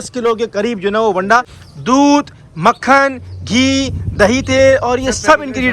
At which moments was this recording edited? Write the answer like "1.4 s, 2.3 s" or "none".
1.6 s